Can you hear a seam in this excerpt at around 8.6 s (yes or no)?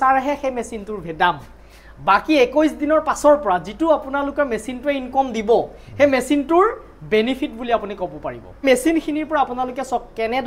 yes